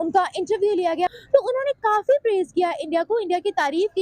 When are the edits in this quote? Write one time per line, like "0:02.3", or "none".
0:01.1